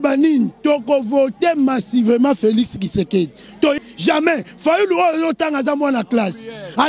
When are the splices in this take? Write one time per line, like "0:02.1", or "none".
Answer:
0:03.8